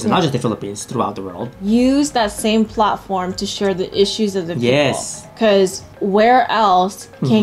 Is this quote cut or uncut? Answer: cut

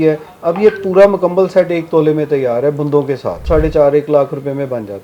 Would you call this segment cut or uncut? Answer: cut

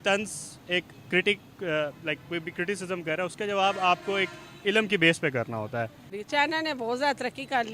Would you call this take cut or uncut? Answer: cut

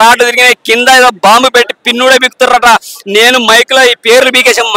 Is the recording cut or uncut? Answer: uncut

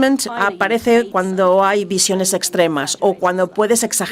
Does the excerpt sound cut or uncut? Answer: uncut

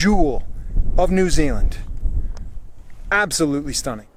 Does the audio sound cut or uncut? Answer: uncut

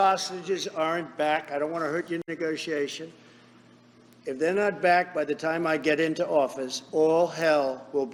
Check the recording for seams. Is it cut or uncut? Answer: uncut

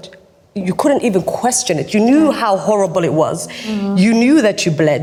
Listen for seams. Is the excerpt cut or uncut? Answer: uncut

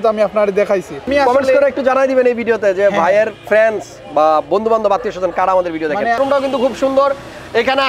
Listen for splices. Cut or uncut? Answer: cut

